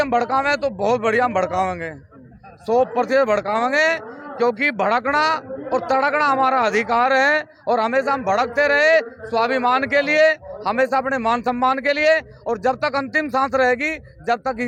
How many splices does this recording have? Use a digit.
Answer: 0